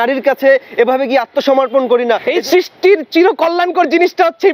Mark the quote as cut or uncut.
cut